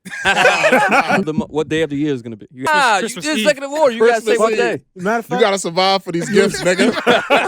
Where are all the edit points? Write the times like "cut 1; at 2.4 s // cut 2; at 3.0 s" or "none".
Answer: cut 1; at 1.3 s // cut 2; at 2.7 s